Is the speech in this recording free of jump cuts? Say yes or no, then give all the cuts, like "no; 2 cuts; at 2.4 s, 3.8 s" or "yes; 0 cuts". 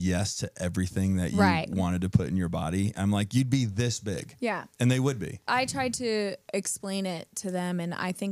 no; 1 cut; at 5.4 s